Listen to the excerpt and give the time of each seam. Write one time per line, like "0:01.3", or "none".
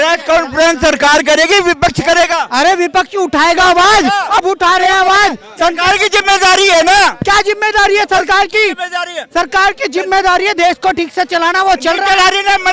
none